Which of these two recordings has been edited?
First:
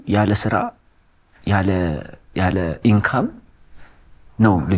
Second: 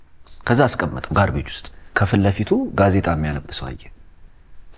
second; 1 cut; at 1.9 s

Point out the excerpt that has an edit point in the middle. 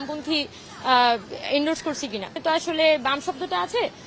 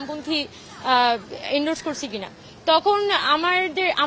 first; 1 cut; at 2.4 s

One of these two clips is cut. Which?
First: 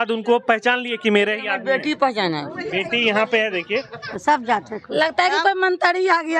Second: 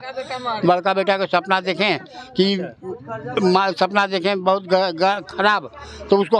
first; 1 cut; at 4.0 s

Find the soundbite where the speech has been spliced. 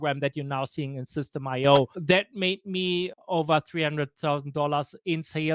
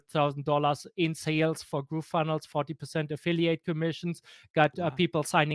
first; 2 cuts; at 2.0 s, 3.2 s

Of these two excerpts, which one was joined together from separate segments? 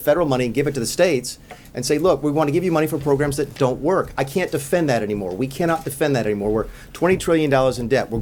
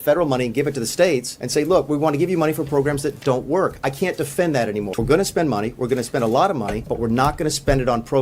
second; 3 cuts; at 1.4 s, 4.9 s, 6.8 s

